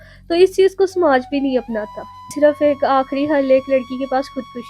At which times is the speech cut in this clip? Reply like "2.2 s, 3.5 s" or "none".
2.3 s